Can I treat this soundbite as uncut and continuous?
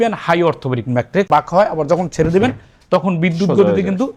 no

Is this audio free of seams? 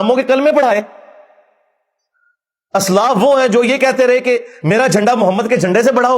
yes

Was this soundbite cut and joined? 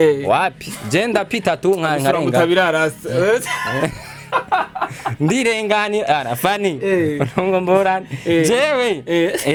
no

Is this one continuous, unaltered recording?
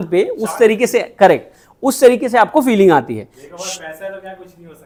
yes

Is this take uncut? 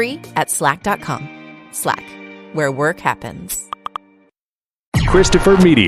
no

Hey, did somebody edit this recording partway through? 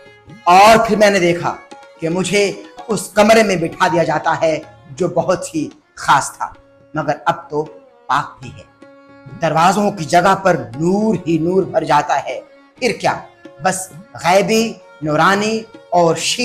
yes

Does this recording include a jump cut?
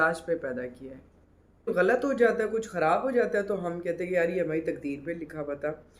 yes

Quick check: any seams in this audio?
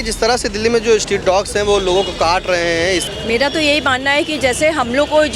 yes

